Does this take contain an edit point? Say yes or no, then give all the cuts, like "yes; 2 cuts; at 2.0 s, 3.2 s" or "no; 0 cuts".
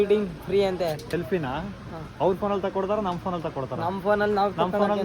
yes; 1 cut; at 1.0 s